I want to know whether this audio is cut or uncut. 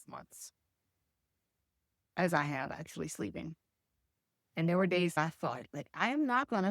cut